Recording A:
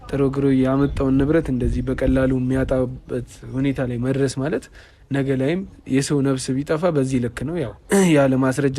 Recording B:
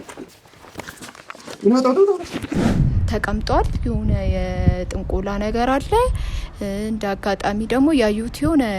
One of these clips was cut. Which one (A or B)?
B